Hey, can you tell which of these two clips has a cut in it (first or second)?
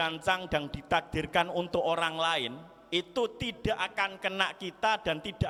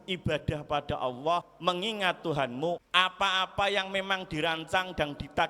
second